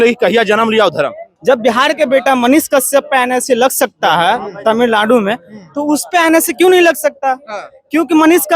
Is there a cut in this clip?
yes; 1 cut; at 1.3 s

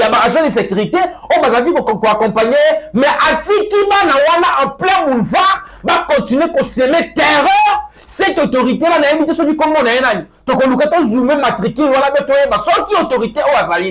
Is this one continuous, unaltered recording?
yes; 0 cuts

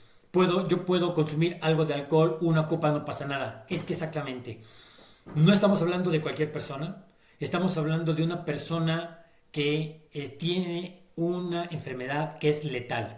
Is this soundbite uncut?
yes; 0 cuts

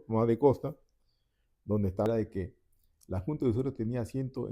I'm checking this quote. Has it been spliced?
yes; 1 cut; at 2.1 s

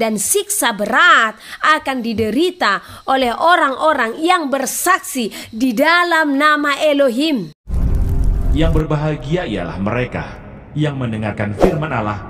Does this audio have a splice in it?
yes; 1 cut; at 7.6 s

